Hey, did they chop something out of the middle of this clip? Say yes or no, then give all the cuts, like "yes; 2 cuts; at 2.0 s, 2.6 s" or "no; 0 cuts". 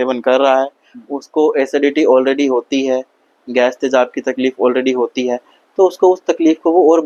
no; 0 cuts